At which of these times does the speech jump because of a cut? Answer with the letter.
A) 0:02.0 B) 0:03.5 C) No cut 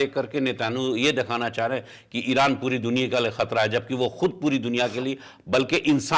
C